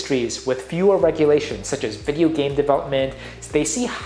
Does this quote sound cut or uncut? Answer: uncut